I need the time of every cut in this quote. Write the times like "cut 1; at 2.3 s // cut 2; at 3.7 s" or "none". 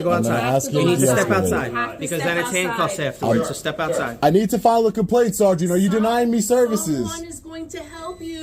cut 1; at 4.2 s

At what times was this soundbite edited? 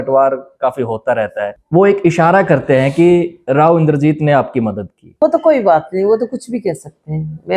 cut 1; at 1.5 s // cut 2; at 5.2 s

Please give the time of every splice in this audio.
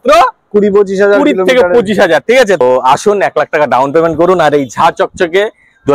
cut 1; at 2.6 s

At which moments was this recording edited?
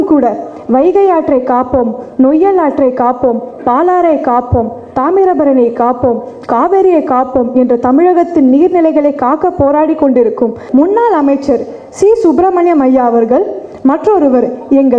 cut 1; at 10.6 s

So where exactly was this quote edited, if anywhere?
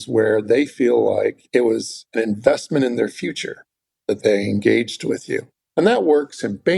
cut 1; at 1.8 s

